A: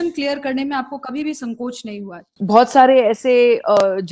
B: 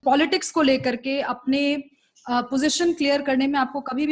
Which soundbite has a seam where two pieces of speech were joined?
A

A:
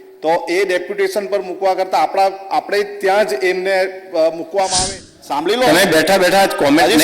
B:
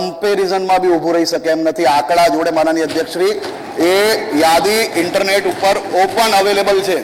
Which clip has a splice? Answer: A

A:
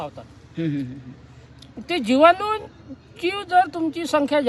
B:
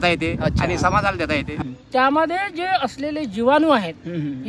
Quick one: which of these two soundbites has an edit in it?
B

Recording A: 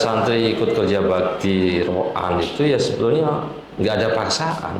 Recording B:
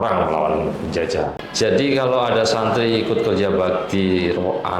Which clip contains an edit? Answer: B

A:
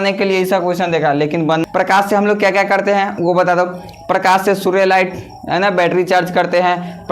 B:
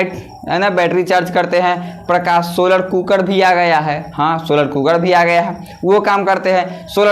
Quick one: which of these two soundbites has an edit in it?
A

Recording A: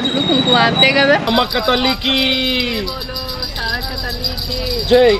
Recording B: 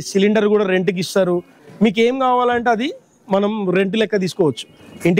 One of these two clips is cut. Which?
A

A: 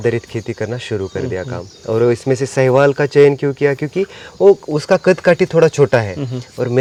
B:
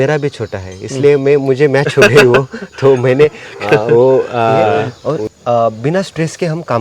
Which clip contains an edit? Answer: B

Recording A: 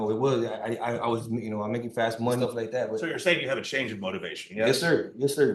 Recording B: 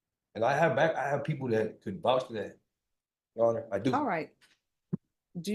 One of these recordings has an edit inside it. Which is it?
A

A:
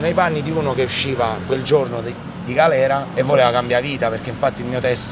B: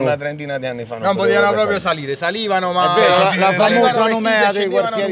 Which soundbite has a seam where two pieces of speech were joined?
A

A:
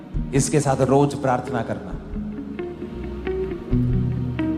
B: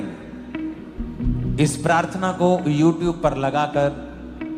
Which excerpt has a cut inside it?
B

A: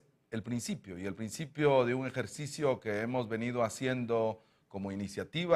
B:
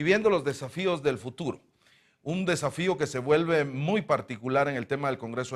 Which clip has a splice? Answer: B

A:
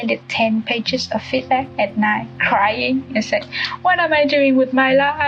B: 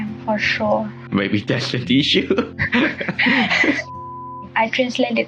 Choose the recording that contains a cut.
B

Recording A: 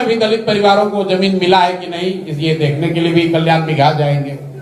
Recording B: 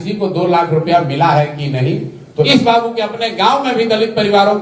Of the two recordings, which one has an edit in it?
B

